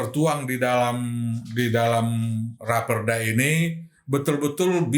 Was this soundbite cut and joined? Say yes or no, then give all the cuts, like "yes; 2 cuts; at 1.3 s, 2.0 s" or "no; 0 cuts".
no; 0 cuts